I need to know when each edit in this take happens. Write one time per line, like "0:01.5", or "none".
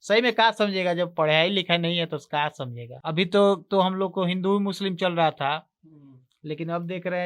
0:02.8